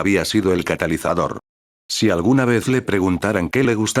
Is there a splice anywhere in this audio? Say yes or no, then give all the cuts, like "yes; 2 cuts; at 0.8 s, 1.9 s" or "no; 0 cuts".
yes; 1 cut; at 1.5 s